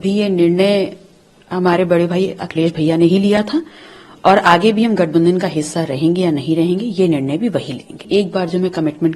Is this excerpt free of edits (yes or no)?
no